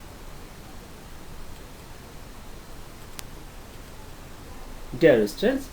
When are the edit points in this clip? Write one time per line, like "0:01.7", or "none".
0:03.2